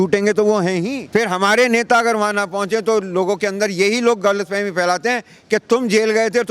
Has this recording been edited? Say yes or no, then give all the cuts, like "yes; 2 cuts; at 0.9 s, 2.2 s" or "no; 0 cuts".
yes; 1 cut; at 1.0 s